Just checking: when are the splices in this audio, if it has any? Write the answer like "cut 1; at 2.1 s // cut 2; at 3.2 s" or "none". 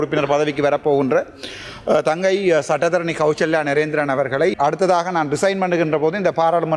cut 1; at 4.6 s